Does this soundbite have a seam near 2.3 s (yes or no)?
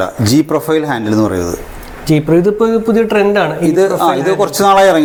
no